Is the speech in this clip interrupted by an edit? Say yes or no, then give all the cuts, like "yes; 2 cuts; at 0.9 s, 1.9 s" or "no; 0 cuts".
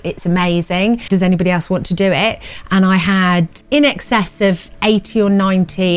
yes; 2 cuts; at 1.0 s, 3.6 s